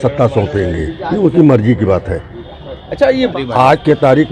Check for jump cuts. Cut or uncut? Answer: cut